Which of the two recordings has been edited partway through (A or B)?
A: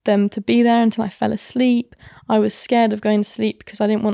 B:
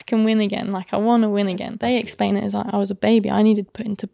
B